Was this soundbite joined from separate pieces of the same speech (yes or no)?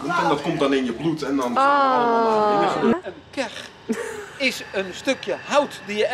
yes